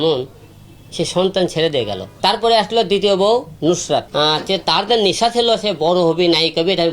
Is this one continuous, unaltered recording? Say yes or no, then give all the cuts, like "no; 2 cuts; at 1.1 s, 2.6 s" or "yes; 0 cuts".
no; 2 cuts; at 2.0 s, 4.1 s